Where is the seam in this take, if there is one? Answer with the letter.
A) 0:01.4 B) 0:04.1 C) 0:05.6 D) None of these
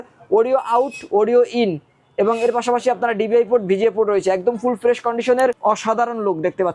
C